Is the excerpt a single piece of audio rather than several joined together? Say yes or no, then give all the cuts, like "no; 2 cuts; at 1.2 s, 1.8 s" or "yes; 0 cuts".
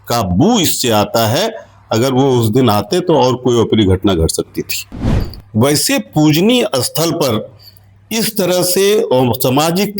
no; 1 cut; at 5.0 s